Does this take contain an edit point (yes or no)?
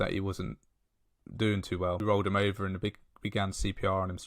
yes